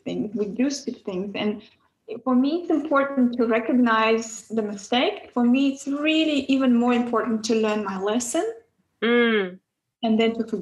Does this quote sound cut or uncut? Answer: uncut